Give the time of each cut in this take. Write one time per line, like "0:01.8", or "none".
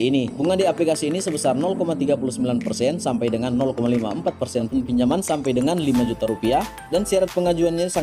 0:04.7